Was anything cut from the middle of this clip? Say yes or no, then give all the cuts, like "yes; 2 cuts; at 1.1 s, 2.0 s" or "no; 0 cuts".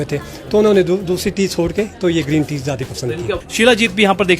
yes; 1 cut; at 3.4 s